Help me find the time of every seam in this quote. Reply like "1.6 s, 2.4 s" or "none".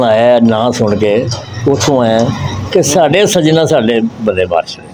none